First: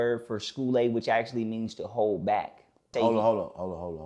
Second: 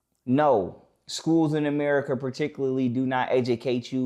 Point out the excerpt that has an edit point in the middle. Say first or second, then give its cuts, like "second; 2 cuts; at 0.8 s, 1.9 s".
first; 1 cut; at 2.9 s